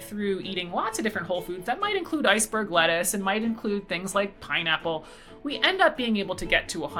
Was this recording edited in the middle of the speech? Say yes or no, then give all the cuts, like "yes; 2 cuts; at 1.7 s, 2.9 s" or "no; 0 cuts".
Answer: no; 0 cuts